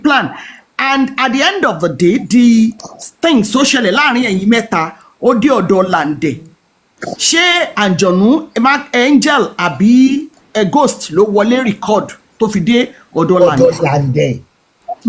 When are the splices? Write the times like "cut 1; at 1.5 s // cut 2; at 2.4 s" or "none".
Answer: none